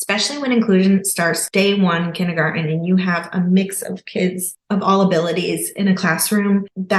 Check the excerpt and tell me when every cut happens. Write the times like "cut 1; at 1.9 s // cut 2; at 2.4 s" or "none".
cut 1; at 1.4 s